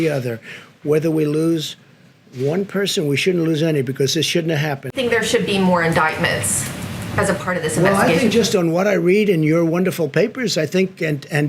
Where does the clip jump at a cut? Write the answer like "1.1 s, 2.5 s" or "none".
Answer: 4.8 s